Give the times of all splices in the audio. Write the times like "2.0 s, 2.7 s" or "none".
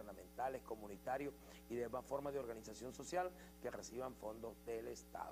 none